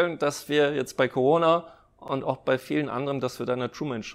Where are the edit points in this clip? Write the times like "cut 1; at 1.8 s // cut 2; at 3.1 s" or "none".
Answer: none

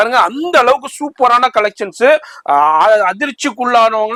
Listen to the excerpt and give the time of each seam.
none

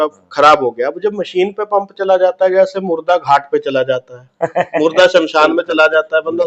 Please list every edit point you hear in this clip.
none

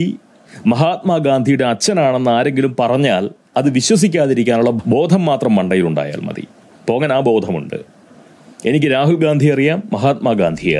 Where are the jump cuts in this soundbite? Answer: none

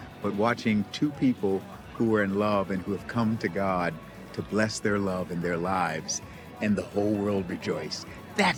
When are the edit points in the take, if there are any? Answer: none

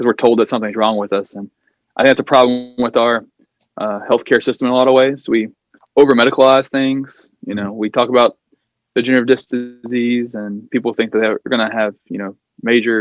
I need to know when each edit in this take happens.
none

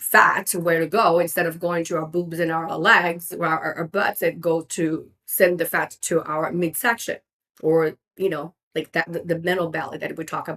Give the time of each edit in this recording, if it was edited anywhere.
none

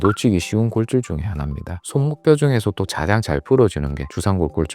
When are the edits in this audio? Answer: cut 1; at 1.8 s

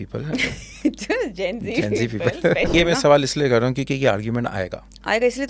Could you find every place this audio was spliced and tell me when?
cut 1; at 2.7 s

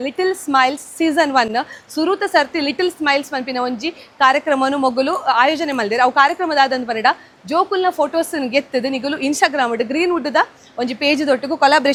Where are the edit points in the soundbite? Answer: none

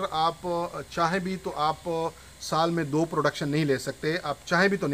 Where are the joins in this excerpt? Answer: none

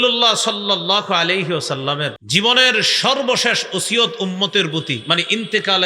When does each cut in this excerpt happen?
cut 1; at 2.2 s

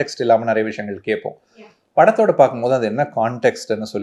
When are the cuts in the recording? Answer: none

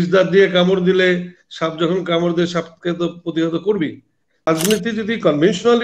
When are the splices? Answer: cut 1; at 4.5 s

